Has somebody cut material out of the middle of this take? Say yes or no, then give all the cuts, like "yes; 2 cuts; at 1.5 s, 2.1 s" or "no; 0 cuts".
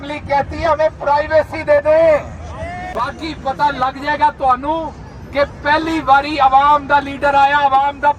yes; 1 cut; at 2.9 s